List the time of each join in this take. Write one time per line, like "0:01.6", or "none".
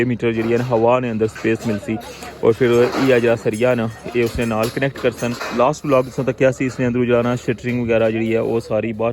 0:05.4